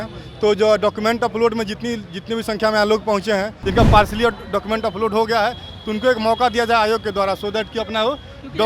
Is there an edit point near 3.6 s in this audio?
yes; 1 cut; at 3.6 s

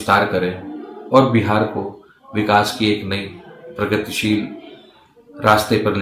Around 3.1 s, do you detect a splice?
no; 0 cuts

